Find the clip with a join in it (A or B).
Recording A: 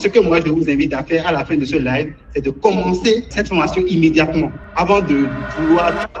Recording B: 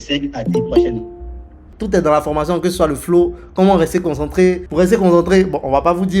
B